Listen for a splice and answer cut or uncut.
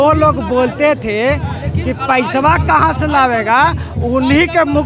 uncut